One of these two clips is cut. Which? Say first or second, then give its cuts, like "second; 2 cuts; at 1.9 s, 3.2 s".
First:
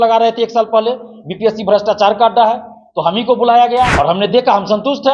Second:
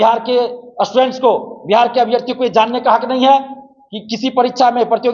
first; 1 cut; at 3.9 s